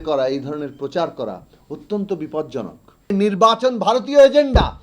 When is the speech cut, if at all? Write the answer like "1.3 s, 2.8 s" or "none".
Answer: 3.1 s